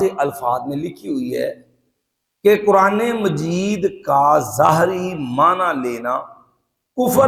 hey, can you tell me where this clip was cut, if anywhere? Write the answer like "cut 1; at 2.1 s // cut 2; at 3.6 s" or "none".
none